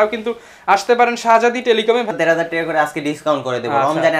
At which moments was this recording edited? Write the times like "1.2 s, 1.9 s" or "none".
2.1 s